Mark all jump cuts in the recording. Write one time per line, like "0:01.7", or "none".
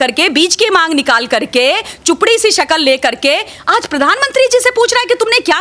none